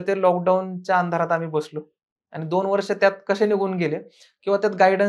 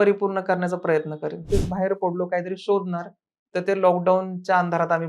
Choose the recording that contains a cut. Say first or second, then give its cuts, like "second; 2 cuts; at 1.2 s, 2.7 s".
second; 1 cut; at 1.4 s